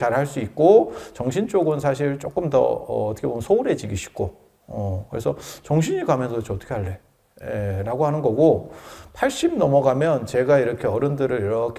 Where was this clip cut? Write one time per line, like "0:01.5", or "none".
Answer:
none